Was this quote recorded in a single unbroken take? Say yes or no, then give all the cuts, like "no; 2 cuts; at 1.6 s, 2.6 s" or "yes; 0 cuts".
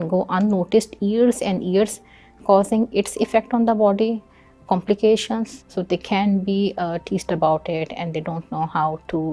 no; 1 cut; at 5.6 s